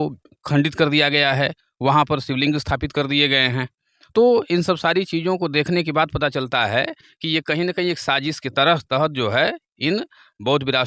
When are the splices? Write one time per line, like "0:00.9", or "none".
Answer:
none